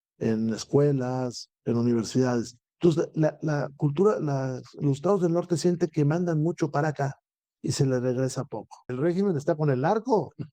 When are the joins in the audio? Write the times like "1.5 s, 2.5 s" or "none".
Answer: 8.8 s